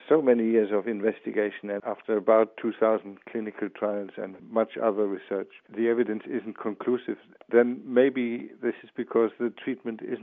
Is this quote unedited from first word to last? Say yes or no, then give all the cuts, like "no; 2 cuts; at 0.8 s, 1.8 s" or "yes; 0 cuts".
yes; 0 cuts